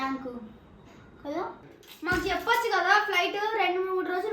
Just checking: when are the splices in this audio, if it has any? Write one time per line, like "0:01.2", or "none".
0:01.6

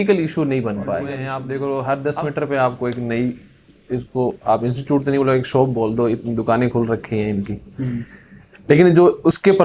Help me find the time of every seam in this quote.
0:01.4

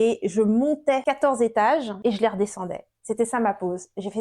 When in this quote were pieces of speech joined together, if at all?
0:01.0
0:01.9

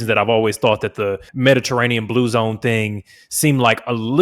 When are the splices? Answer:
0:01.3

